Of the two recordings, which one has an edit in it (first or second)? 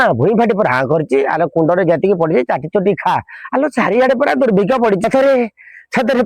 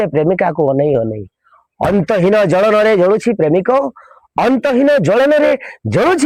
first